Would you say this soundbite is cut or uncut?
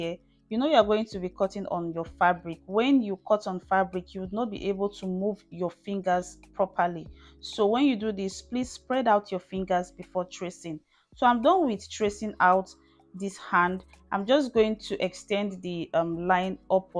uncut